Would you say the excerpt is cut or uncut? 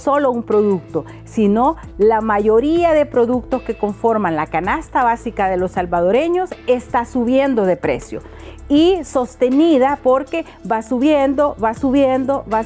uncut